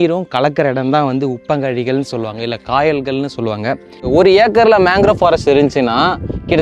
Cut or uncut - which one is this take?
cut